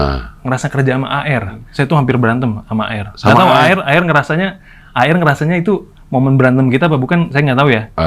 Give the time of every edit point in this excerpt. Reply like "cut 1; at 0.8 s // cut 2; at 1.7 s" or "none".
cut 1; at 1.6 s